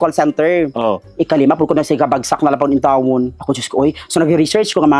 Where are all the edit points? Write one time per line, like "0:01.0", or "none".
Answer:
none